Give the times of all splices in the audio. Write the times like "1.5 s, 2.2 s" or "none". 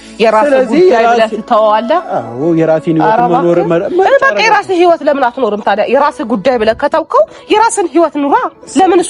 none